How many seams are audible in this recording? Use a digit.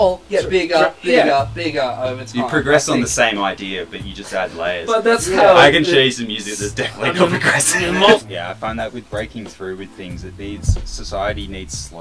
1